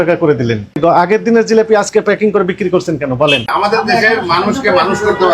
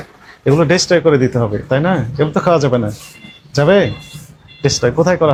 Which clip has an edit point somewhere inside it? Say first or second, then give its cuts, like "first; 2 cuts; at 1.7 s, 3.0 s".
first; 2 cuts; at 0.8 s, 3.5 s